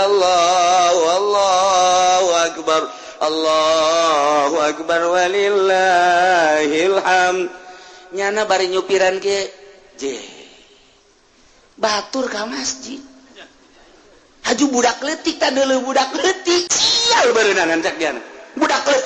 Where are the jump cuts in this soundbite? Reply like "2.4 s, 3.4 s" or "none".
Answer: 16.7 s